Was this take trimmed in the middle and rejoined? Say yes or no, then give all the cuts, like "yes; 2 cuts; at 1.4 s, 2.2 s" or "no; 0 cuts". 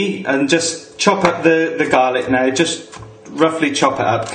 yes; 1 cut; at 1.8 s